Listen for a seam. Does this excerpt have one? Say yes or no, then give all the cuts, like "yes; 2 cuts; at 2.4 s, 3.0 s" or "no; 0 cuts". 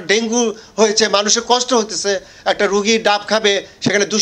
no; 0 cuts